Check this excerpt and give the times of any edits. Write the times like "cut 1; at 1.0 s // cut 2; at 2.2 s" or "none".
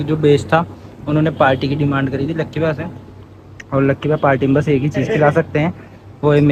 none